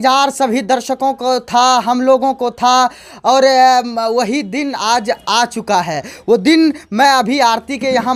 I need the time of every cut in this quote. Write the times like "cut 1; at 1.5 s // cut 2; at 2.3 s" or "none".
none